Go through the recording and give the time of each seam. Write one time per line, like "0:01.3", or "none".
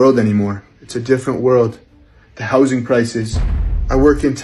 none